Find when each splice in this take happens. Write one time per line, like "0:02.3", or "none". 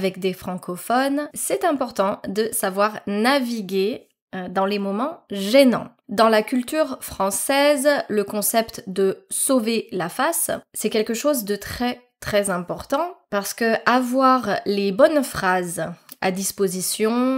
0:06.0